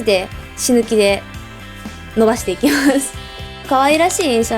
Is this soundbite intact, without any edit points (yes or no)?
no